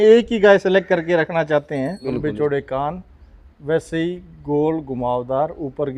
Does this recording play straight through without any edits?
no; 1 cut; at 2.1 s

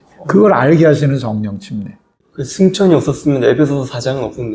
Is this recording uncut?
no; 1 cut; at 2.5 s

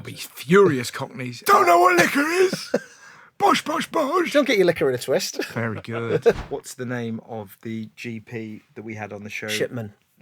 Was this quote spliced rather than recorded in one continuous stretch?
yes; 3 cuts; at 1.4 s, 5.4 s, 6.4 s

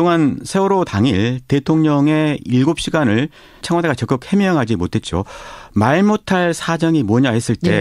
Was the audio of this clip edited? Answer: yes; 1 cut; at 4.2 s

